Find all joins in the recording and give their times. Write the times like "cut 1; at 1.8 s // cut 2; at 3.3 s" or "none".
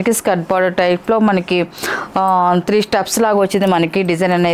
none